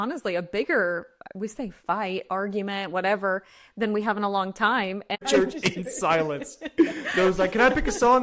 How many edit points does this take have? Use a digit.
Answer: 1